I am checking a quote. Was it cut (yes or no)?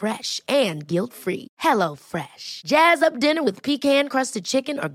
no